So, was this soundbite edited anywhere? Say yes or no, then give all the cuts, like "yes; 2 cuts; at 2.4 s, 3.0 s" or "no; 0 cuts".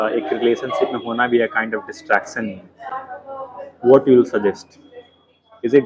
no; 0 cuts